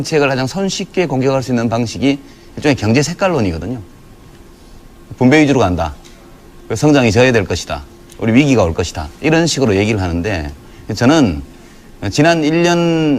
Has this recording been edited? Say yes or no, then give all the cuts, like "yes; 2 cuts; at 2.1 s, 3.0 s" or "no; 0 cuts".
no; 0 cuts